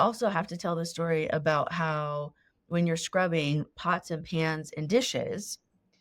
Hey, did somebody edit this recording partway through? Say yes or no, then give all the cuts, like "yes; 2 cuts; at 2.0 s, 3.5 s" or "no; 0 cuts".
no; 0 cuts